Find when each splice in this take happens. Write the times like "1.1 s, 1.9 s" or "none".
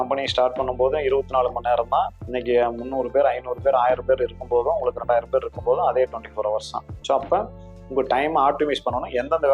none